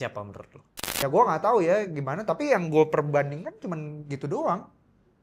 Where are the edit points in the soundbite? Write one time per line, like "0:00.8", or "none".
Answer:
0:01.0